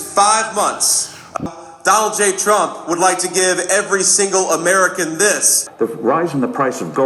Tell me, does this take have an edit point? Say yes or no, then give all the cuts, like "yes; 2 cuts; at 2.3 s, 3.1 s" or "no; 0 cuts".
yes; 2 cuts; at 1.4 s, 5.6 s